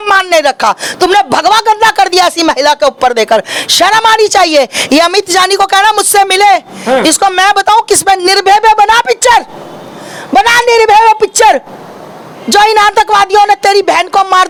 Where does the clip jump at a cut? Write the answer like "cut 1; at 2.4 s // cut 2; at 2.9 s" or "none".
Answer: none